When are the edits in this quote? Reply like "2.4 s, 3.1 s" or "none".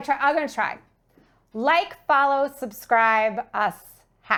none